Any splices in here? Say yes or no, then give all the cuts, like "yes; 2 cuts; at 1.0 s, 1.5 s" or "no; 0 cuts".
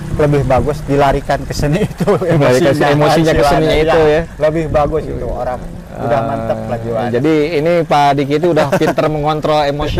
no; 0 cuts